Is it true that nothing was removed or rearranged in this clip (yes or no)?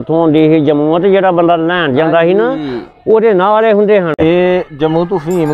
no